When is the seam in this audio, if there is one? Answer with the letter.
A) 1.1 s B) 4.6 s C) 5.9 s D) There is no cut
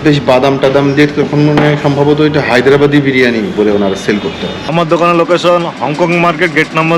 B